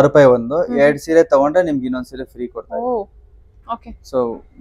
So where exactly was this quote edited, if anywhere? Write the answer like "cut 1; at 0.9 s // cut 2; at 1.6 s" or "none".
none